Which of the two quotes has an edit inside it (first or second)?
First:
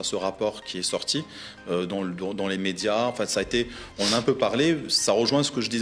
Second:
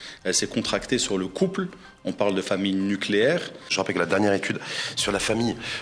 second